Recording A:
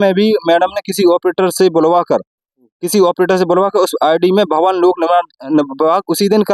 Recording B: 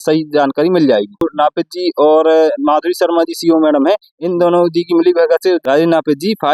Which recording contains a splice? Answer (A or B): B